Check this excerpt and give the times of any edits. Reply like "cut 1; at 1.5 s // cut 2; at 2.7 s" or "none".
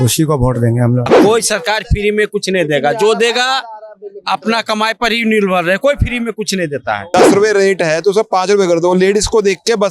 cut 1; at 1.1 s // cut 2; at 7.1 s